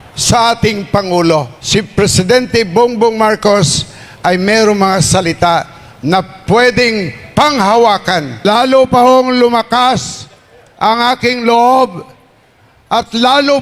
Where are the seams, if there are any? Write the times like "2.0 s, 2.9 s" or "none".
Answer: 1.6 s, 8.4 s